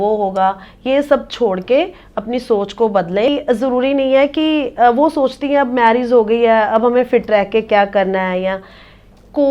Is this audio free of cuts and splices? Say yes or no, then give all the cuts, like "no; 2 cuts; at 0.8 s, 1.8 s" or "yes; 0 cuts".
no; 1 cut; at 3.3 s